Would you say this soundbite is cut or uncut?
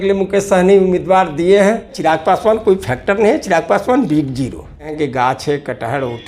cut